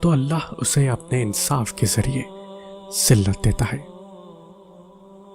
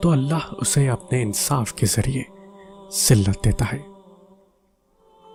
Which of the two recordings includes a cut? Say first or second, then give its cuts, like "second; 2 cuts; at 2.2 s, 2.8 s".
first; 1 cut; at 3.8 s